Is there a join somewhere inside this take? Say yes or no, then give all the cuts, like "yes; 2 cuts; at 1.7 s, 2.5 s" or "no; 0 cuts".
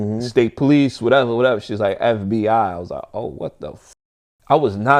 no; 0 cuts